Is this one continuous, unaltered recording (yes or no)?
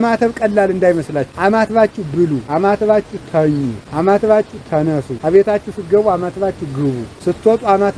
no